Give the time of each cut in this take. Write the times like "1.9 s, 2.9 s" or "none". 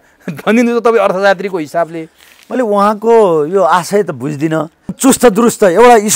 5.0 s